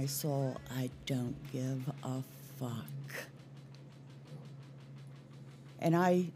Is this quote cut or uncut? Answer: uncut